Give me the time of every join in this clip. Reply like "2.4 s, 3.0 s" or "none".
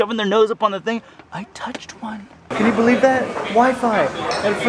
2.5 s